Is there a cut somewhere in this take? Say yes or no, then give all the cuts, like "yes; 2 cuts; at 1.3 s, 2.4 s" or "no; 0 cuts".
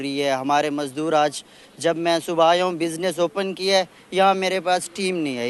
no; 0 cuts